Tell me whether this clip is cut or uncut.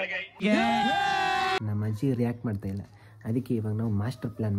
cut